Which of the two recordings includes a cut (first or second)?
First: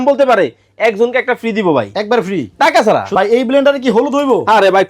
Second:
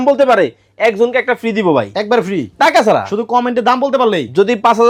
first